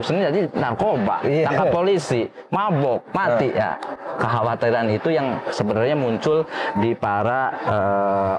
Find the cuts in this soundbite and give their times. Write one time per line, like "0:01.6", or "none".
none